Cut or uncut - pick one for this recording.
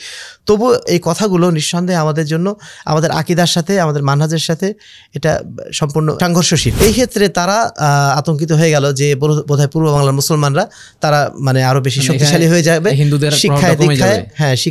cut